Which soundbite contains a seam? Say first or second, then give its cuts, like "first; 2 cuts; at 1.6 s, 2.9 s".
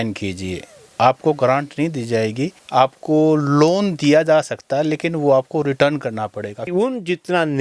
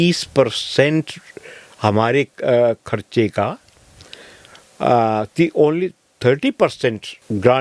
first; 1 cut; at 6.7 s